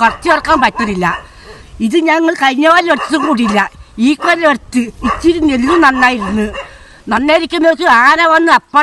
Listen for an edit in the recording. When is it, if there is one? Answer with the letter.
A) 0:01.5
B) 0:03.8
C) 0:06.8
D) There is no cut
D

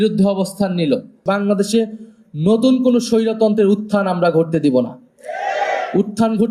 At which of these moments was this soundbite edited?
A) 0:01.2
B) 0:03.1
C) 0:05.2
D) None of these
A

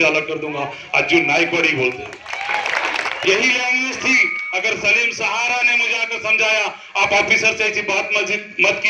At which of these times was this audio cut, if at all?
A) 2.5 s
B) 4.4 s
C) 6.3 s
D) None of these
D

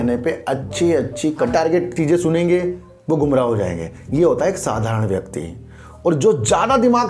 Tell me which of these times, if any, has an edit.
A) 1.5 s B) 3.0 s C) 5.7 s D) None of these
A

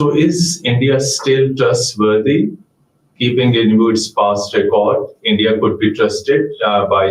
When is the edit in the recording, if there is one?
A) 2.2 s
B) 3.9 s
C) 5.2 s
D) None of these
D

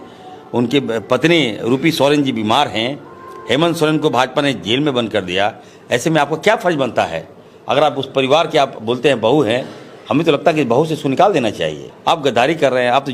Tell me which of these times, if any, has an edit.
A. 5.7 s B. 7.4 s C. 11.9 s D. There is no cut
C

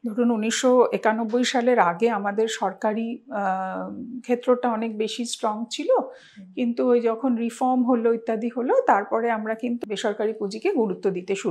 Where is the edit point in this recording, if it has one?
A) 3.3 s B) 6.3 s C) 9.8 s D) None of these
C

